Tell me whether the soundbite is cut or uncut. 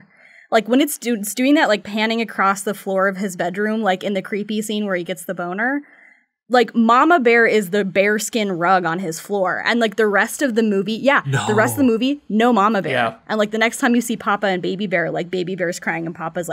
uncut